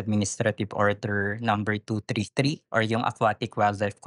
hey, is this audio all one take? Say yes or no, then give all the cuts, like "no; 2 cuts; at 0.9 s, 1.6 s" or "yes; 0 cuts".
no; 1 cut; at 2.6 s